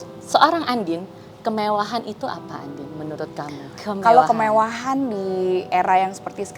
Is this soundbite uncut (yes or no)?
no